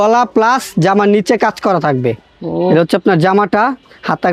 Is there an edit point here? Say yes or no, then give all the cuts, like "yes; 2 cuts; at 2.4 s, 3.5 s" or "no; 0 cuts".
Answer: no; 0 cuts